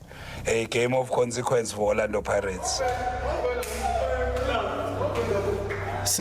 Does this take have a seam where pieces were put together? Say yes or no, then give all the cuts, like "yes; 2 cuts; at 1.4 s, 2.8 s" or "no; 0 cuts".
no; 0 cuts